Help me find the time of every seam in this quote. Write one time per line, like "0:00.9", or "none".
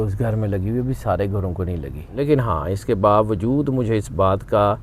0:02.1